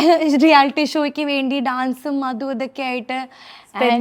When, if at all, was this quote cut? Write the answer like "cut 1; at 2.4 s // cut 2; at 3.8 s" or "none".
none